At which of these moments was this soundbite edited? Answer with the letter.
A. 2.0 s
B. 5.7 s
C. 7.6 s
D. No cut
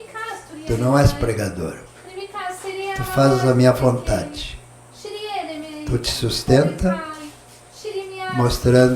D